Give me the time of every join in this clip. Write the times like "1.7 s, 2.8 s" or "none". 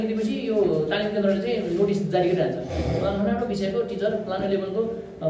none